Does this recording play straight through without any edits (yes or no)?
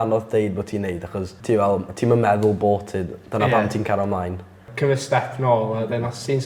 no